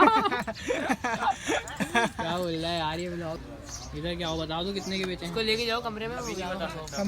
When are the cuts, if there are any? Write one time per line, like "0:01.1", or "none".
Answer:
0:03.4